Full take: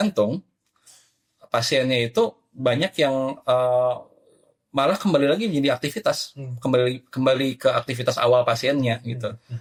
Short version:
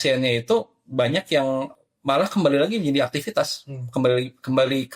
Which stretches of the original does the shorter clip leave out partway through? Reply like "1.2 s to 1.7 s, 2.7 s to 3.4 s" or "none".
3.4 s to 4.4 s